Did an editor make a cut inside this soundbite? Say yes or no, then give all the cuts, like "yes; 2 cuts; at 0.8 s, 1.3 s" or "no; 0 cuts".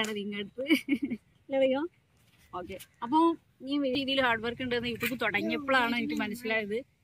yes; 1 cut; at 3.9 s